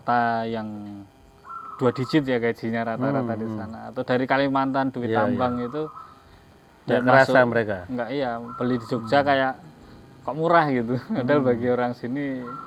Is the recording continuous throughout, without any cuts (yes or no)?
yes